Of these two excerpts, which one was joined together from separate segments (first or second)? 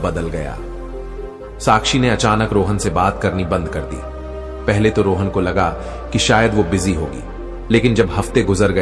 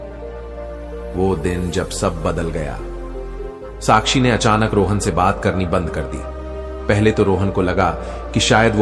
second